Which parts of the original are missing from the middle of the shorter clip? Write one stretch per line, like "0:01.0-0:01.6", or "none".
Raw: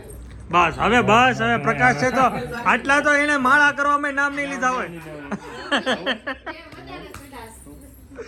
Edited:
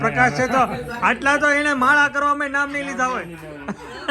none